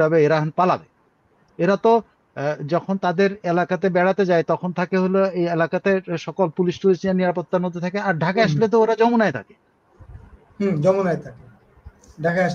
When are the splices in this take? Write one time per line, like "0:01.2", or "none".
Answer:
none